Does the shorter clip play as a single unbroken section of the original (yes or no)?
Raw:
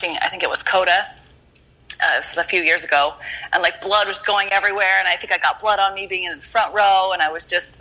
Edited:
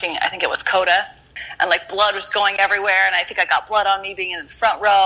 no